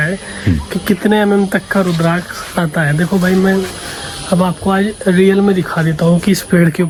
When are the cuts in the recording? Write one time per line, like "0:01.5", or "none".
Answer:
none